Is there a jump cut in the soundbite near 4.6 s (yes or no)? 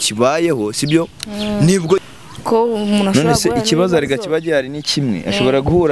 no